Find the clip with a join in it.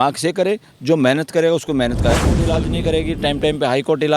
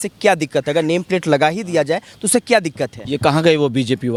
first; 1 cut; at 2.5 s

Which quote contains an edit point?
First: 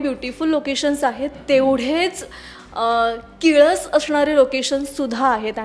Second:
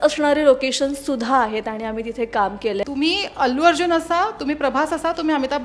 second; 1 cut; at 2.8 s

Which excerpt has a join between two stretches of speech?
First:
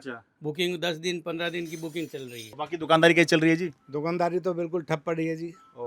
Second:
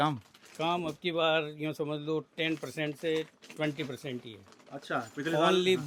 first; 1 cut; at 2.4 s

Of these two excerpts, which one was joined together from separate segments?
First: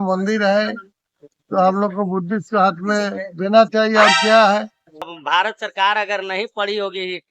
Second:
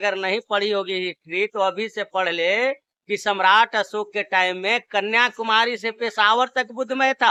first; 1 cut; at 5.2 s

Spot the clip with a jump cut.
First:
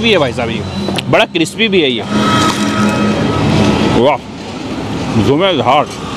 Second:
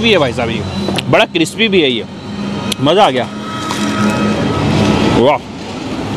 first; 1 cut; at 2.1 s

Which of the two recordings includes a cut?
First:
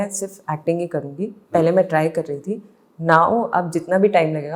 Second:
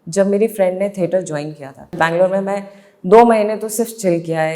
second; 1 cut; at 1.9 s

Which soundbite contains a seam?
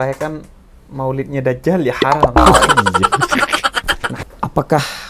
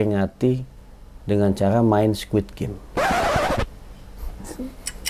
first; 1 cut; at 4.2 s

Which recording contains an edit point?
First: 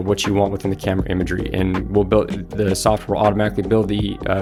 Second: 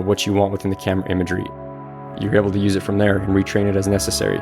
second; 1 cut; at 1.9 s

